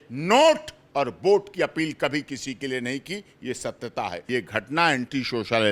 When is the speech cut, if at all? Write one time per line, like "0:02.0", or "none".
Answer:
0:04.2